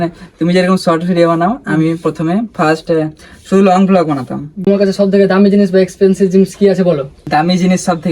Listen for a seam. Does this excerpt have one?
yes; 2 cuts; at 4.7 s, 7.1 s

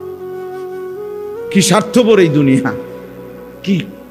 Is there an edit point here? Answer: yes; 1 cut; at 1.0 s

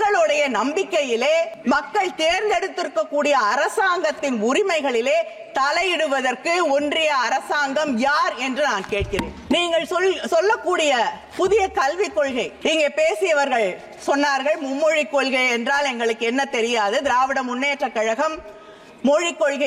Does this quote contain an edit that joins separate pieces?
yes; 4 cuts; at 1.5 s, 9.4 s, 11.2 s, 12.5 s

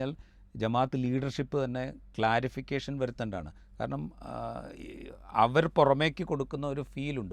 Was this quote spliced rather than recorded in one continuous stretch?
no; 0 cuts

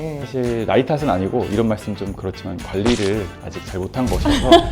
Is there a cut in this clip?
no; 0 cuts

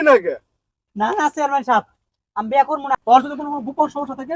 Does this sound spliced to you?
yes; 1 cut; at 2.9 s

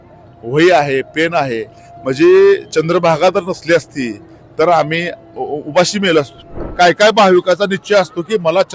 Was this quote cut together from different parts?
yes; 1 cut; at 6.6 s

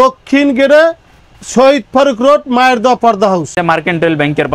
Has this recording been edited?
no; 0 cuts

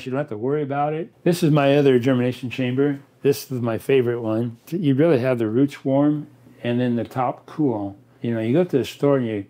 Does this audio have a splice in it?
yes; 3 cuts; at 1.1 s, 4.6 s, 8.1 s

